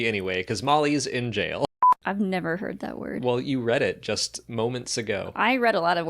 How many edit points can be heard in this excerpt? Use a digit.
1